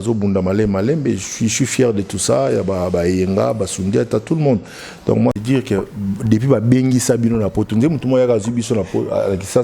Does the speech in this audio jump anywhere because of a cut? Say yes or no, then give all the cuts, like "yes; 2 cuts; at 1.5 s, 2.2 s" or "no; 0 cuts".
yes; 1 cut; at 5.4 s